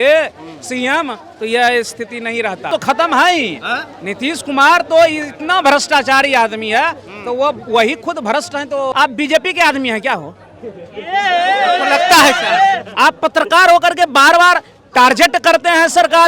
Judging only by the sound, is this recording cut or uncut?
cut